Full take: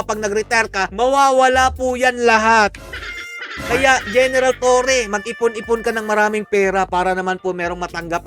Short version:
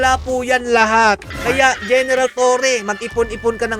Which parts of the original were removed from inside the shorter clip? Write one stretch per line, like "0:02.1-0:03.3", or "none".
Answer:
0:02.8-0:03.6